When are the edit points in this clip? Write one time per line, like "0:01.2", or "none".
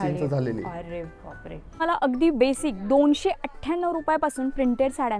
0:01.8